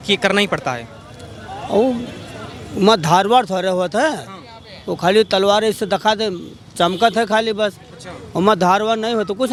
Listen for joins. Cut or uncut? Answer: uncut